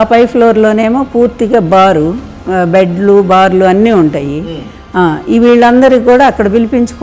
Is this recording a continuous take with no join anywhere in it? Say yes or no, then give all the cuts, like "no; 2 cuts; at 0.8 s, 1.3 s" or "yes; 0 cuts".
no; 1 cut; at 2.4 s